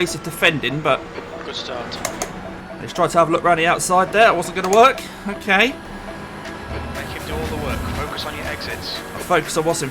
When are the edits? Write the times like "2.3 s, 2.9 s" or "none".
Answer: 2.1 s, 6.5 s